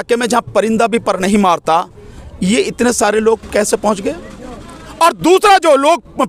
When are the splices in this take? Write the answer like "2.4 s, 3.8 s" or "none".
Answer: none